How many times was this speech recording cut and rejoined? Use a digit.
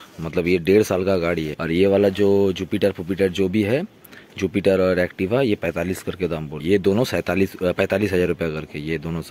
2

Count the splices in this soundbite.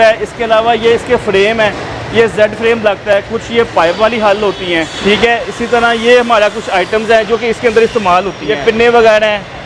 2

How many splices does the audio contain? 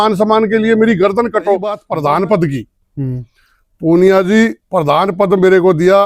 0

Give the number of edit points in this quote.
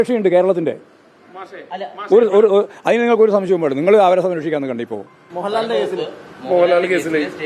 1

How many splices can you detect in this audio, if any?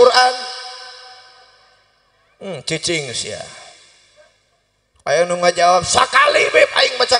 0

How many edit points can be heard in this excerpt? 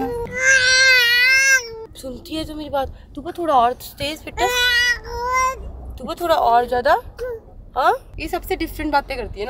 0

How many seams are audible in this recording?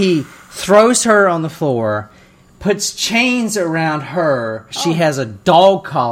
1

